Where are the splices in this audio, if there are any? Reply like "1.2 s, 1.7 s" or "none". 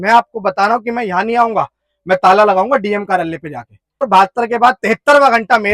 4.1 s